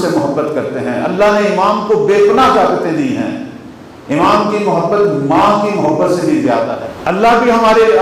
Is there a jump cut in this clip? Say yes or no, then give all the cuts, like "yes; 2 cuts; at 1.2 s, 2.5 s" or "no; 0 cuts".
yes; 1 cut; at 6.8 s